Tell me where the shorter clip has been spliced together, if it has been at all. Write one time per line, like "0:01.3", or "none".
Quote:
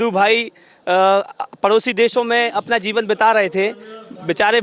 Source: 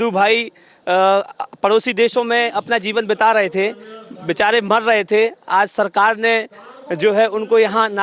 none